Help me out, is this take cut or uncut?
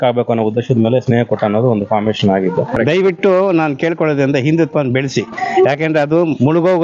cut